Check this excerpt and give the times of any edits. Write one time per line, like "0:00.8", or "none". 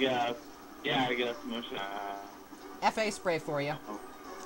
0:03.0